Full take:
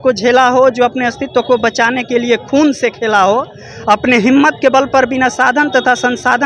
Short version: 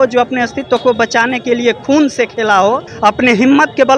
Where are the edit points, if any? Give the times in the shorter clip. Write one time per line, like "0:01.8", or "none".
0:02.9

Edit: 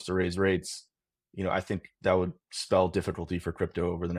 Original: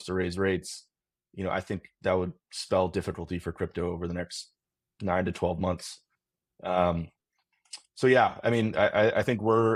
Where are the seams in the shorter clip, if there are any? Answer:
none

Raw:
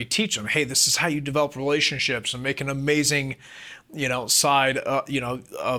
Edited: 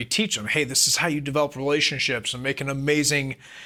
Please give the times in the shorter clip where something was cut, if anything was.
none

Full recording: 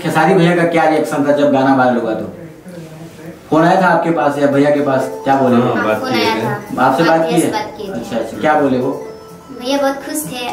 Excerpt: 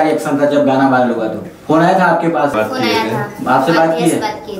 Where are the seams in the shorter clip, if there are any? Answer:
0:01.5
0:02.5

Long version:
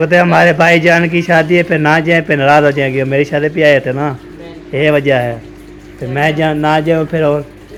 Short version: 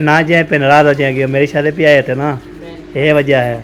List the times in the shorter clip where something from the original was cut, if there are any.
none

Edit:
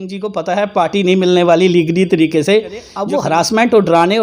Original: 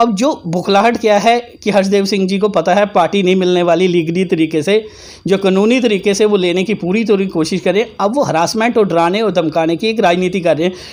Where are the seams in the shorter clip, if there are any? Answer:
0:02.9

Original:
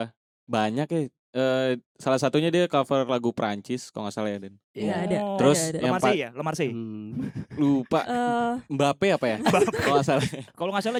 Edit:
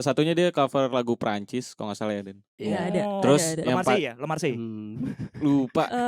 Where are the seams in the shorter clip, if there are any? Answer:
none

